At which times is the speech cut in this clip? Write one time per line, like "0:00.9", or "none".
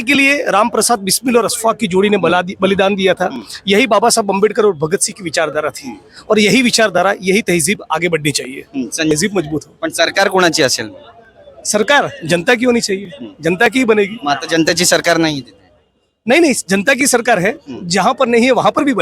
0:09.1